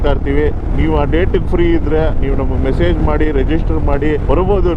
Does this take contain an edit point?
no; 0 cuts

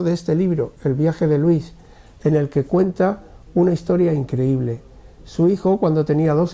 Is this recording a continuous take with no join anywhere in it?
yes; 0 cuts

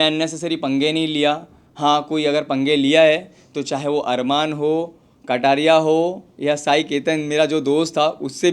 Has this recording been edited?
no; 0 cuts

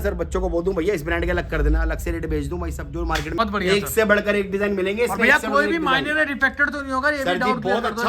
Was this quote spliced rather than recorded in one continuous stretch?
yes; 1 cut; at 3.4 s

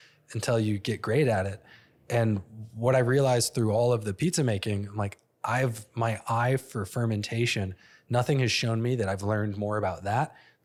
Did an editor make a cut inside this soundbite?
no; 0 cuts

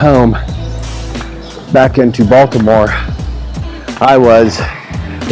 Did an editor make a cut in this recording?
no; 0 cuts

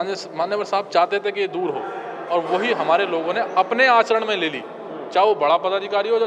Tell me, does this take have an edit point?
no; 0 cuts

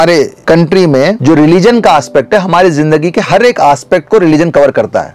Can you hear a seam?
no; 0 cuts

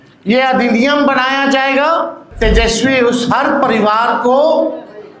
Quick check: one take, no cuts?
no; 1 cut; at 2.2 s

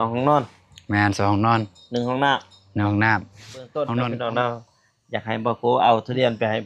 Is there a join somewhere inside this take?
yes; 1 cut; at 3.9 s

